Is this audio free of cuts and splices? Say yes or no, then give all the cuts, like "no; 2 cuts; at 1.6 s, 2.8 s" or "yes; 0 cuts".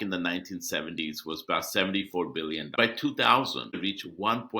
no; 2 cuts; at 2.7 s, 3.8 s